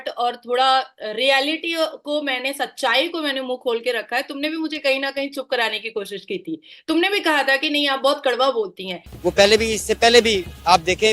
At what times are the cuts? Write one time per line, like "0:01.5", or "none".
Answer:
0:09.0